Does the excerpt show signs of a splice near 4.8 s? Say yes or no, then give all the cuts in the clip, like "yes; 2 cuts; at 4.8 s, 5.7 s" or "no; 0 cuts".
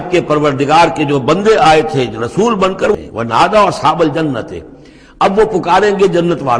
no; 1 cut; at 2.9 s